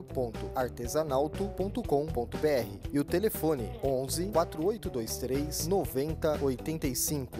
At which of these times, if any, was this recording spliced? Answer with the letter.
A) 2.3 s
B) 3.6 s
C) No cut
C